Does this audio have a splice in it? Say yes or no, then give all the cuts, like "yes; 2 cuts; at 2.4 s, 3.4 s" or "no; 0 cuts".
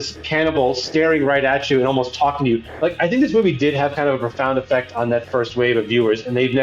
no; 0 cuts